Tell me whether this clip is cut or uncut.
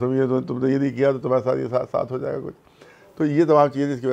uncut